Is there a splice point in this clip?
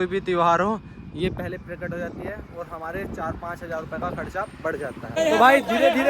yes; 1 cut; at 5.1 s

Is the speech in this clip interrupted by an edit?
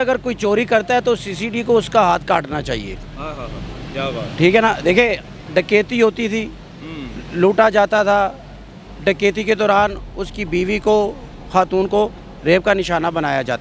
no; 0 cuts

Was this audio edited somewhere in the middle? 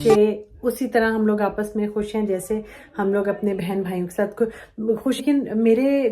yes; 1 cut; at 5.2 s

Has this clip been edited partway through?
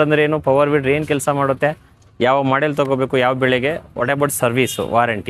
no; 0 cuts

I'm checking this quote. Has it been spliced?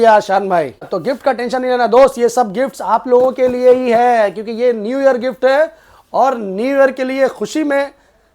yes; 1 cut; at 0.9 s

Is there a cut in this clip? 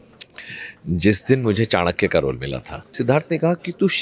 yes; 1 cut; at 2.9 s

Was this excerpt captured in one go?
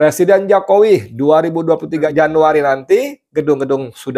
no; 1 cut; at 2.1 s

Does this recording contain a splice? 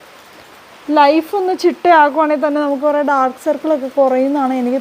no; 0 cuts

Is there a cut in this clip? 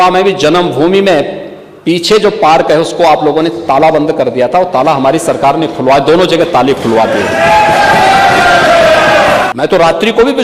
yes; 1 cut; at 9.5 s

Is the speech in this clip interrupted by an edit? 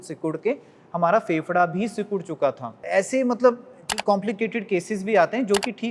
yes; 1 cut; at 2.8 s

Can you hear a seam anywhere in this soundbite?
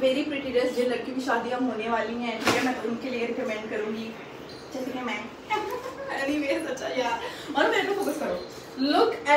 no; 0 cuts

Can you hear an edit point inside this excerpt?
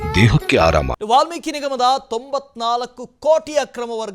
yes; 1 cut; at 1.0 s

